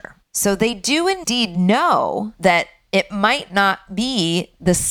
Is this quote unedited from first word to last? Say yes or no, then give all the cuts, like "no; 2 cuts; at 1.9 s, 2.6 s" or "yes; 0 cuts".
no; 1 cut; at 1.2 s